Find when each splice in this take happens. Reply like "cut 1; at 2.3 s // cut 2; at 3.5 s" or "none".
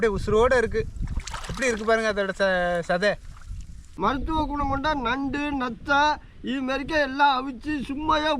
cut 1; at 3.9 s